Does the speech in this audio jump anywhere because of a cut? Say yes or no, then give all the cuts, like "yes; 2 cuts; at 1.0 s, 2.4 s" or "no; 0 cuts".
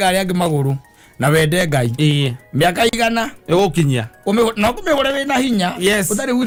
no; 0 cuts